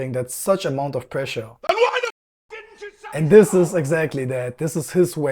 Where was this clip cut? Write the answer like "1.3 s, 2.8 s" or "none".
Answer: none